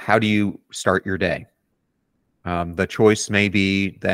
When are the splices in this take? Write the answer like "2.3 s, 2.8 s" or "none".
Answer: none